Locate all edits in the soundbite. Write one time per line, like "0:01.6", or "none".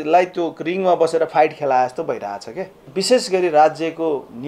0:02.9